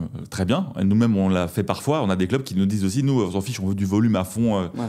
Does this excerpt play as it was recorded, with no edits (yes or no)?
yes